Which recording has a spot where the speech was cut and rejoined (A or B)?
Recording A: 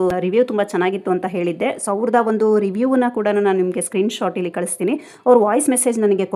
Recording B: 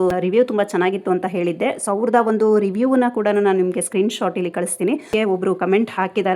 B